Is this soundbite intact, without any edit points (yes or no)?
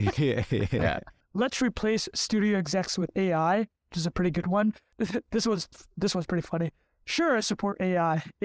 no